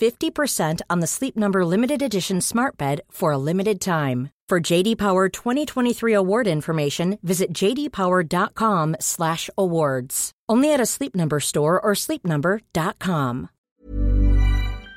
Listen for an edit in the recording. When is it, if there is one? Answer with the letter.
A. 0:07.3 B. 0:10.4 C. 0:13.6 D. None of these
C